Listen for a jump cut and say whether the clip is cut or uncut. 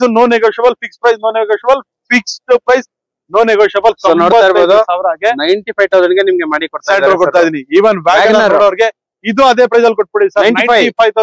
uncut